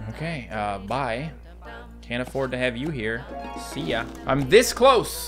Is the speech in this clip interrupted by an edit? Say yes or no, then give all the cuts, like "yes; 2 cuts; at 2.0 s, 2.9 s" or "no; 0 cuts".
no; 0 cuts